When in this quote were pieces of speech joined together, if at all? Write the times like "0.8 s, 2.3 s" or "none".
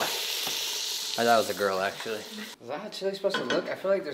2.4 s

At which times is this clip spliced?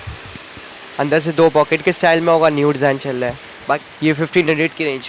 3.9 s

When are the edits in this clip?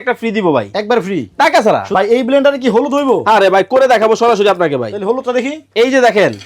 1.9 s

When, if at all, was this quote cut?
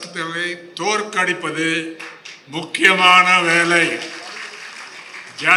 none

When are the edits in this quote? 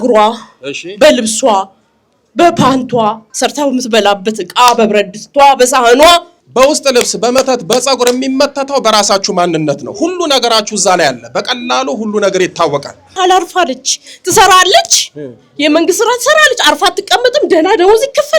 3.3 s, 6.4 s, 13.2 s

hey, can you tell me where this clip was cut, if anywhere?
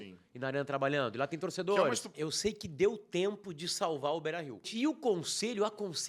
2.1 s, 4.7 s

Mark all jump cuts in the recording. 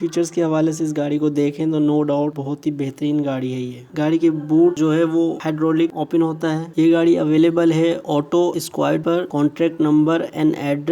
3.9 s, 6.7 s

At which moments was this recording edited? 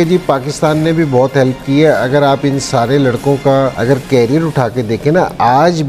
none

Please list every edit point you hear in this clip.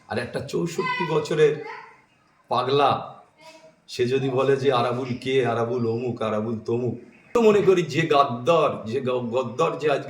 7.3 s

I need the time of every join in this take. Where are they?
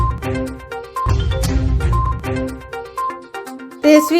1.1 s

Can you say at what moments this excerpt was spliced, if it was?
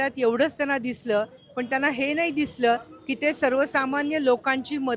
none

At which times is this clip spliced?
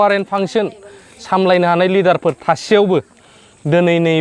none

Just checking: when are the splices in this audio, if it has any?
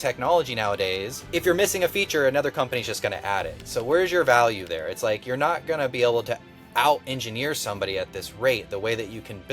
1.1 s

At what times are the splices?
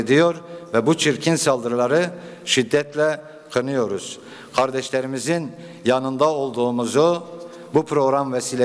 none

